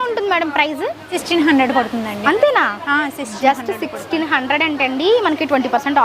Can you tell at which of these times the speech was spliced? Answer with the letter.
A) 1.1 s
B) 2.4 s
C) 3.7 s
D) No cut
A